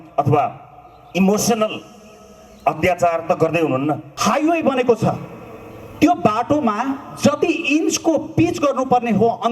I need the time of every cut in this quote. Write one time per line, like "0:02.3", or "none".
0:04.1